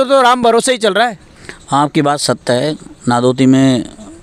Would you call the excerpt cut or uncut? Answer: uncut